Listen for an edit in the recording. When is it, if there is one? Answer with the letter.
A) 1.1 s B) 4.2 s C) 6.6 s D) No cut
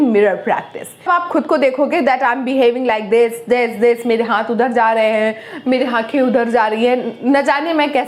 A